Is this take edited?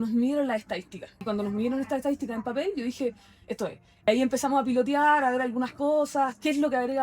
yes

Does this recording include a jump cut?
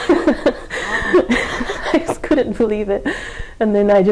no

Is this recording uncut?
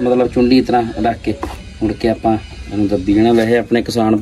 yes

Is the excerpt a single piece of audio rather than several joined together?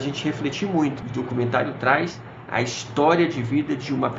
no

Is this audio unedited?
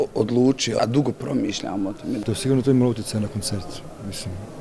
no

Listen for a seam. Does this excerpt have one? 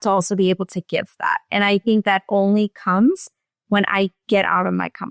no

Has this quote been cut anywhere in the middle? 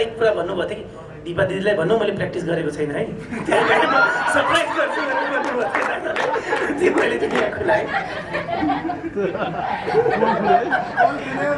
no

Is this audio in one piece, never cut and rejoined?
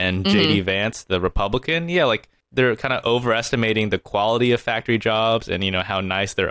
no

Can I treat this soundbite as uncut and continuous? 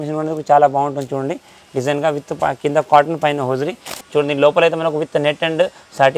no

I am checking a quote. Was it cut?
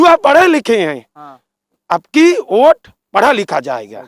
no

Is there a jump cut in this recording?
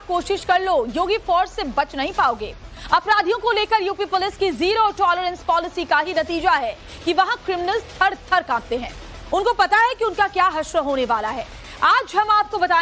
yes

